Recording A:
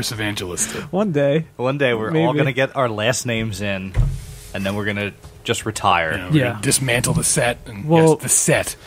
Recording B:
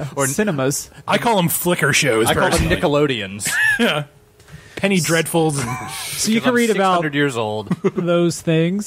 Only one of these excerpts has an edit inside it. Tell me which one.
B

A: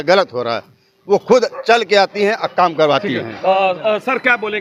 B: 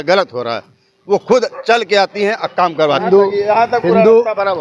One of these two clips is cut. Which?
B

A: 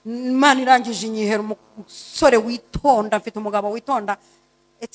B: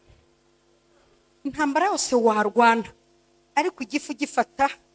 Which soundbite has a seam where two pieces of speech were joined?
B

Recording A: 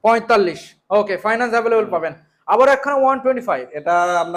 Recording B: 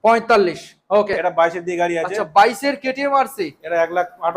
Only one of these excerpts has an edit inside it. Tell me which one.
B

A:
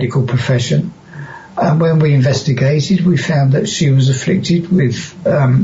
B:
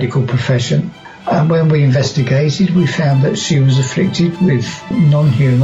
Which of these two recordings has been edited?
B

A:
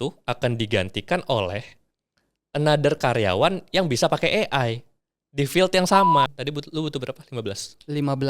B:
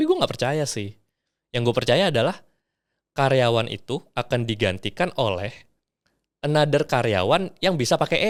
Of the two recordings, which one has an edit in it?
A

